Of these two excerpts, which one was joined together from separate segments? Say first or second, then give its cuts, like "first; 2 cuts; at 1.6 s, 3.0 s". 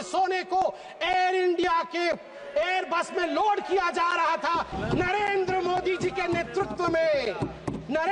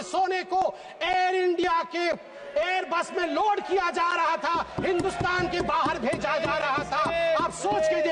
first; 1 cut; at 4.7 s